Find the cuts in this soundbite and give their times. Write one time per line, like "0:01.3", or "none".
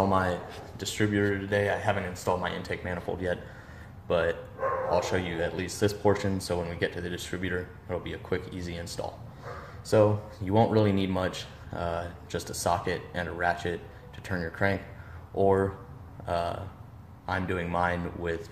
0:10.9